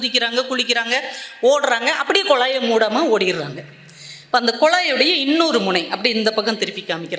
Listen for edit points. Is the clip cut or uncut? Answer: uncut